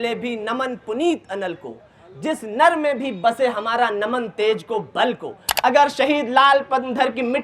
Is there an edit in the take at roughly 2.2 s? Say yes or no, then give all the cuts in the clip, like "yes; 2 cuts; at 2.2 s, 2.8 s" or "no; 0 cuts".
no; 1 cut; at 5.5 s